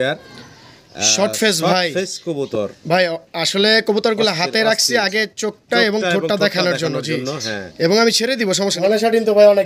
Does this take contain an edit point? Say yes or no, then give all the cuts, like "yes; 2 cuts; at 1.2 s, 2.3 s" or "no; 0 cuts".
yes; 1 cut; at 8.8 s